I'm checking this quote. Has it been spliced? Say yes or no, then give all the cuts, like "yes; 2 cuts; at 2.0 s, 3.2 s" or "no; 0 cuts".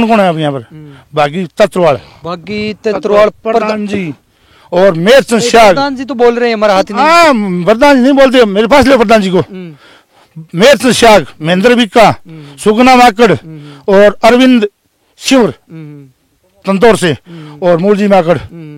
no; 0 cuts